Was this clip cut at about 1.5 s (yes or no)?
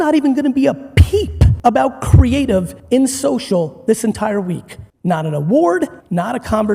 yes